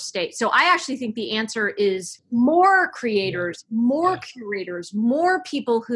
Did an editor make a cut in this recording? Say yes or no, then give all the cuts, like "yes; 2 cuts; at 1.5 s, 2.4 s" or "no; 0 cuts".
yes; 1 cut; at 2.1 s